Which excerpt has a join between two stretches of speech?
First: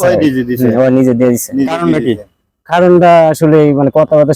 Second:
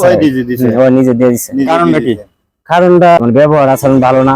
second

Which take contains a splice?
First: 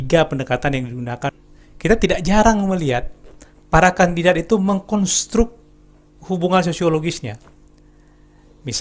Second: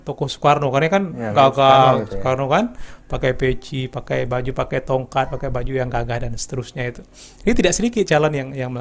first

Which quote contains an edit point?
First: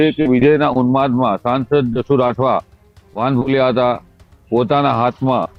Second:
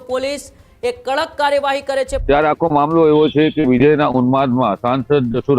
second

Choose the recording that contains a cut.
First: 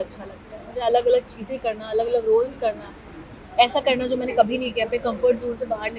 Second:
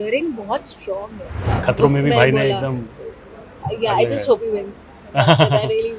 second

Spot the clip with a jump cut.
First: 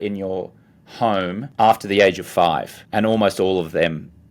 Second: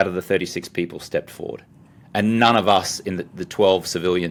first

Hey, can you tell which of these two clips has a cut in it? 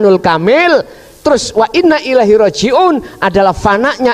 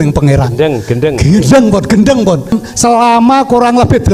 second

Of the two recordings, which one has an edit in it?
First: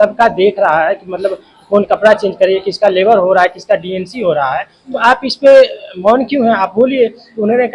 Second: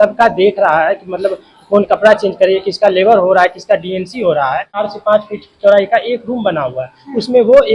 second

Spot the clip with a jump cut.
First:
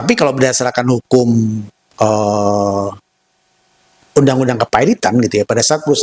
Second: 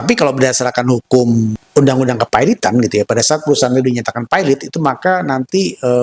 second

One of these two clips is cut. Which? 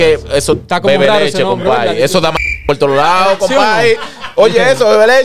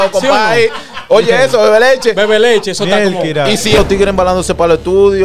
second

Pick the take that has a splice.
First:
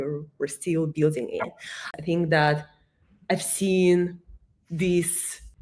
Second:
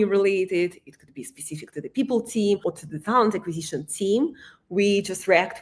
first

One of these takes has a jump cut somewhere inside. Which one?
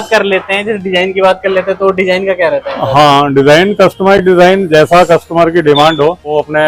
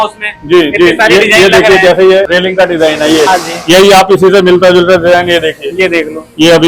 second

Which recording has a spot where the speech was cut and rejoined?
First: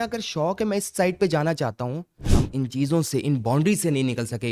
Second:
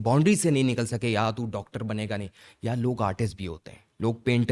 first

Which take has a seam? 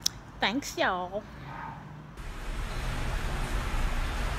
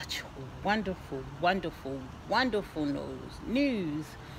first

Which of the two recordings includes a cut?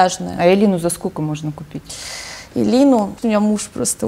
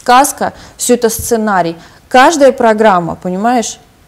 first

